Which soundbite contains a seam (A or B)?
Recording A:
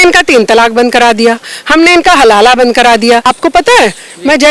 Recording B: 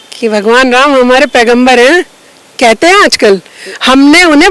A